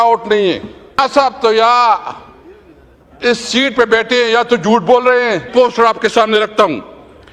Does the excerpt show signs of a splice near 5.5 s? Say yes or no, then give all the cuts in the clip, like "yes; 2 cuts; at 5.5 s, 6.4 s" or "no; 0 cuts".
yes; 2 cuts; at 1.0 s, 5.5 s